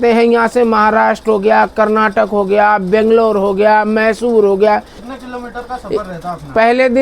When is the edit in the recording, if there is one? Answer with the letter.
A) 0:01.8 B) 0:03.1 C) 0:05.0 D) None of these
C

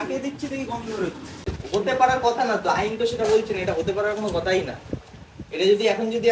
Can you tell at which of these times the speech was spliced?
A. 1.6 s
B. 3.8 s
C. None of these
A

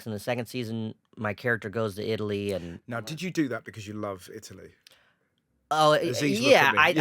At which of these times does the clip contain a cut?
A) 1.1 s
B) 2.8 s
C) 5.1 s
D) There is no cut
D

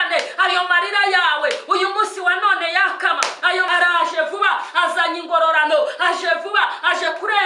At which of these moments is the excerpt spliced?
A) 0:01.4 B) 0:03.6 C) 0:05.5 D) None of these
B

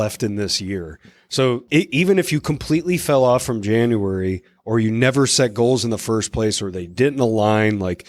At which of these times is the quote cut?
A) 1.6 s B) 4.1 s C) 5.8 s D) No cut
A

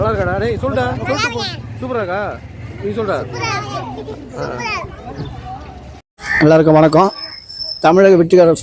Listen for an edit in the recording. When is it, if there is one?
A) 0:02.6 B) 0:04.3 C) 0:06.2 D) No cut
C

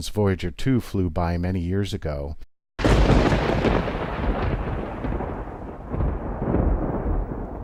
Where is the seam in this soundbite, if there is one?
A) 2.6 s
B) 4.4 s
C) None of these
C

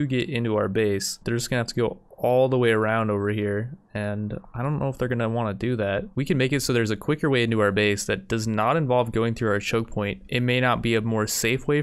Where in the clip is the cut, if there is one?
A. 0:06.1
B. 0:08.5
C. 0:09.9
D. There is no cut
A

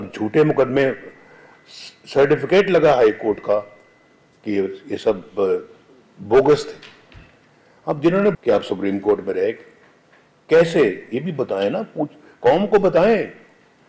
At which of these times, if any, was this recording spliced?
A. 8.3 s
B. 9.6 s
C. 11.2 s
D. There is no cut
A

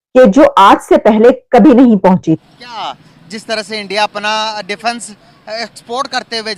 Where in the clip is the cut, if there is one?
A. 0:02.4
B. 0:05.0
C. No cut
A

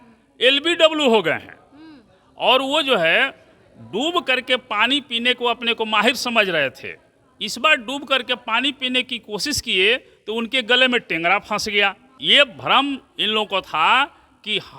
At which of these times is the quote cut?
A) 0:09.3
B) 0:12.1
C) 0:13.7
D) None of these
B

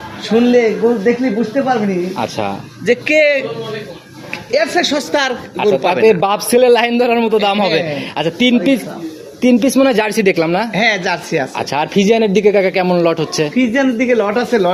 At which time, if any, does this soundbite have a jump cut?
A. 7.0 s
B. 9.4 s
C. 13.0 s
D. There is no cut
D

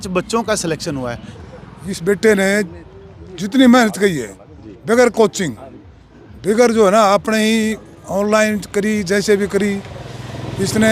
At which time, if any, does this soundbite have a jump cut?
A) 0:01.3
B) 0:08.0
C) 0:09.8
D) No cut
A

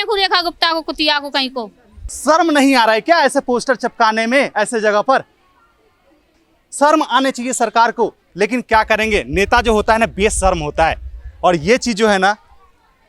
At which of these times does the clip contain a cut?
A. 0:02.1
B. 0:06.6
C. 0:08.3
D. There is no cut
A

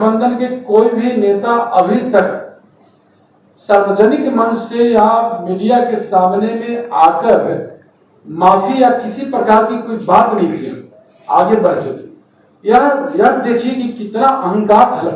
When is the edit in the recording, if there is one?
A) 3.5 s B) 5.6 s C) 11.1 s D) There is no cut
D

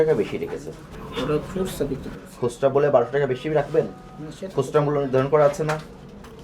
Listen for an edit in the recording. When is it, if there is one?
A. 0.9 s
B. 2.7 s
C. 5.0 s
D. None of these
A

